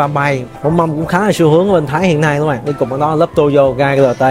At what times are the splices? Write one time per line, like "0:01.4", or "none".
none